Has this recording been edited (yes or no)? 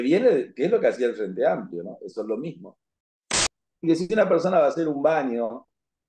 yes